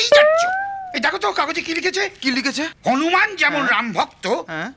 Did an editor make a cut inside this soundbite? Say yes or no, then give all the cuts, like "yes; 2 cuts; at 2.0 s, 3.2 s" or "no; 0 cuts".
yes; 1 cut; at 2.7 s